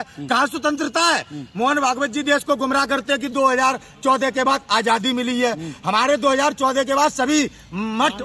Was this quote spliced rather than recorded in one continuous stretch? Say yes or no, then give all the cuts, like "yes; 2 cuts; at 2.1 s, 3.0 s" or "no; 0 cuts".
no; 0 cuts